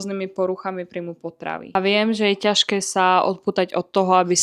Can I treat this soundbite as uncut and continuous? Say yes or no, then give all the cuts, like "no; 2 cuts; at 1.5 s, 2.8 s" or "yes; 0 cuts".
no; 1 cut; at 1.6 s